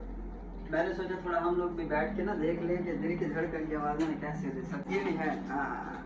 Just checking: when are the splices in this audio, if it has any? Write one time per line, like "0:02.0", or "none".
0:04.8